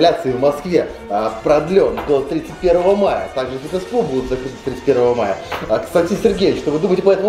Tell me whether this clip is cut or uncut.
uncut